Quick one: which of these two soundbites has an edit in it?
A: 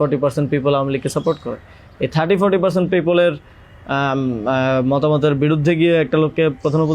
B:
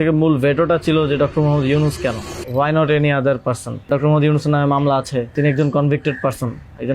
B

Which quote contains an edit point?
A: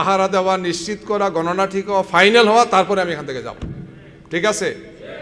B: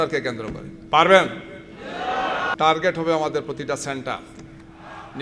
B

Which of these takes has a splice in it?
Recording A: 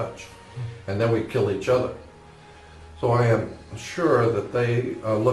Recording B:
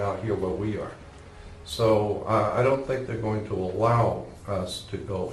A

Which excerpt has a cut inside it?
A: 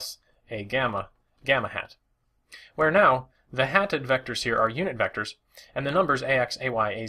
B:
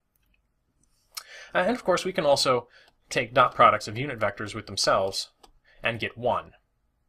A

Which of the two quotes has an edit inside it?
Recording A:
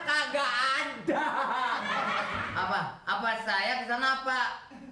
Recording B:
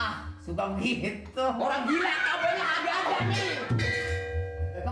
A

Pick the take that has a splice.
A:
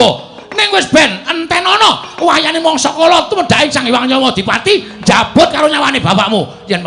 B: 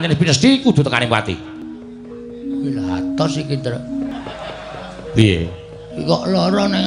B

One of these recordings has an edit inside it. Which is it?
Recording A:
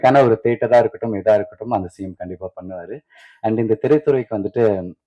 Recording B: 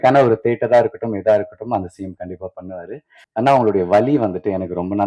B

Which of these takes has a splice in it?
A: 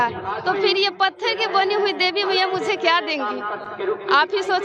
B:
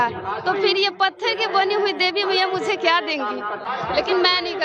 B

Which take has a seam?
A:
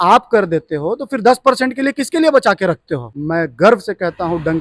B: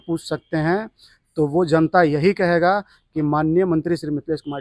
A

